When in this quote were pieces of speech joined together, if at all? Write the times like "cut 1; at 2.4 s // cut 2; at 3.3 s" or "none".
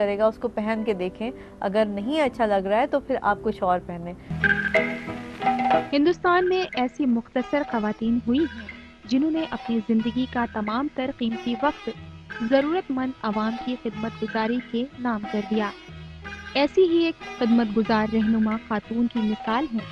cut 1; at 4.3 s